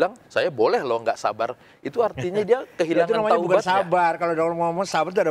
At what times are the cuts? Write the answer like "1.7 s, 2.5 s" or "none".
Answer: none